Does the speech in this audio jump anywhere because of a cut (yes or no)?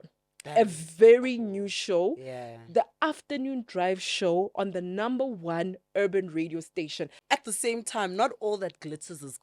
yes